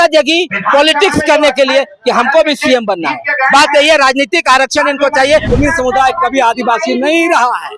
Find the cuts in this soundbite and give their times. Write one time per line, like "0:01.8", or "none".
0:05.5